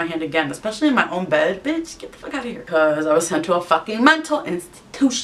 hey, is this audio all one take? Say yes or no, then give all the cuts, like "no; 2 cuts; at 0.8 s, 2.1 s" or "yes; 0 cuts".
no; 1 cut; at 2.6 s